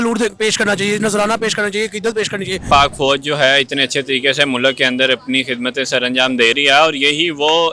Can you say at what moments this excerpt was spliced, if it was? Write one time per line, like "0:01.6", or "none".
0:02.6